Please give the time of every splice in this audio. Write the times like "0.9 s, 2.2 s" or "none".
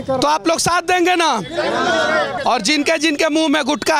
none

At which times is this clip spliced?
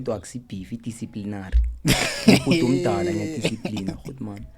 none

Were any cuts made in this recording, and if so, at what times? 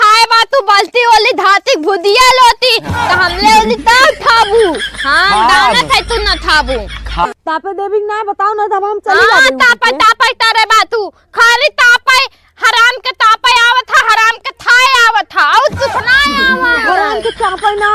7.3 s

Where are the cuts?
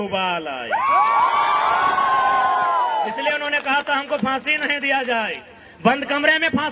none

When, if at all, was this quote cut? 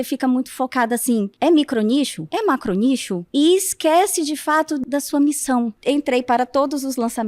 1.3 s, 2.2 s, 3.2 s, 4.8 s, 5.8 s

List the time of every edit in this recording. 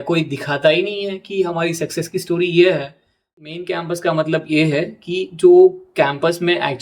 3.4 s

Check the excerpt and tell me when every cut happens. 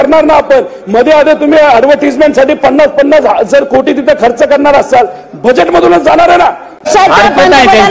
6.9 s

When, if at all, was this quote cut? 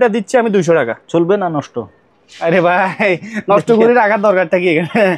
none

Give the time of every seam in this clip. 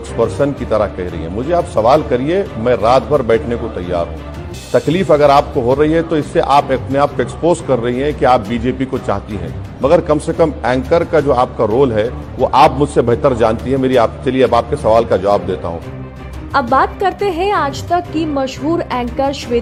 none

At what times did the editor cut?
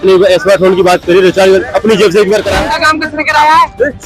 2.6 s

